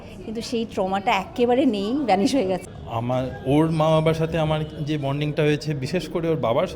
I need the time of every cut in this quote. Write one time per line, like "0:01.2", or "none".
0:02.8